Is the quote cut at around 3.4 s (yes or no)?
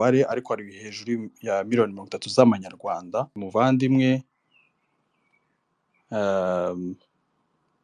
yes